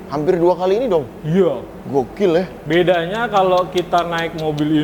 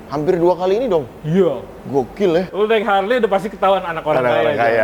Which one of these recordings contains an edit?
second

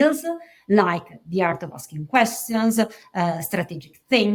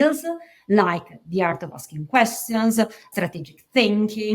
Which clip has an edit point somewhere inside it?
second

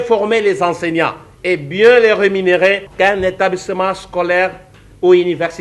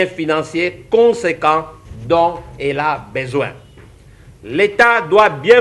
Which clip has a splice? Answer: first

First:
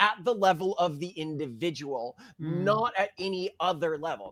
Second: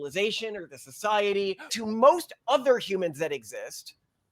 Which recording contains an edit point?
second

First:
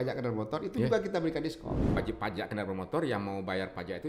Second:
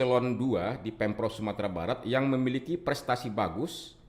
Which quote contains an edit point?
first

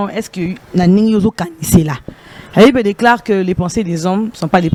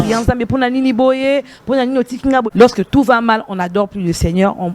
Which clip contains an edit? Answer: second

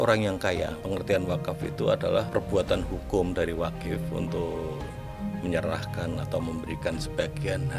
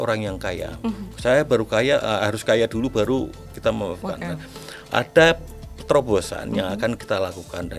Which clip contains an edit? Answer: first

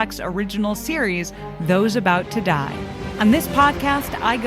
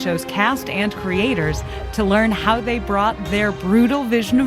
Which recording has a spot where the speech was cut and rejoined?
first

